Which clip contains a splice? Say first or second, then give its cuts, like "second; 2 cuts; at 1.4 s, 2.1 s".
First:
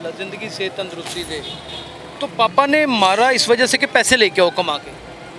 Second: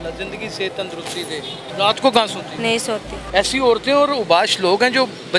second; 2 cuts; at 1.6 s, 3.0 s